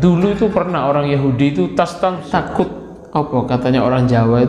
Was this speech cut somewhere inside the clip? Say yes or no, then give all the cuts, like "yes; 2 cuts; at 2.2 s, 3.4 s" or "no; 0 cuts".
yes; 1 cut; at 2.2 s